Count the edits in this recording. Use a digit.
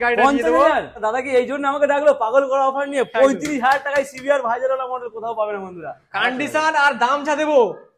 2